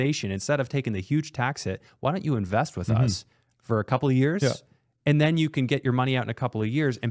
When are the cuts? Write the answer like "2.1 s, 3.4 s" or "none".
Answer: none